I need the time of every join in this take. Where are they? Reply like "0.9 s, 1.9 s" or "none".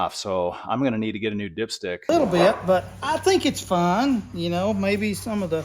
2.1 s